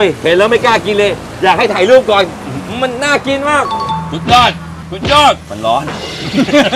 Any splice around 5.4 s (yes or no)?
no